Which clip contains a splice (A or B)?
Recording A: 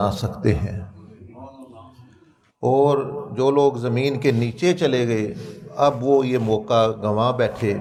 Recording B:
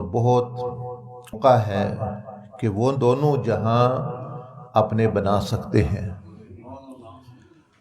B